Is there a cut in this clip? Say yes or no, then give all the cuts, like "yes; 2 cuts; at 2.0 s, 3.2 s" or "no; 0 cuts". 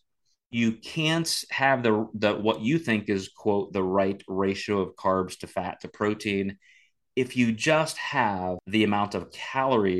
yes; 1 cut; at 8.6 s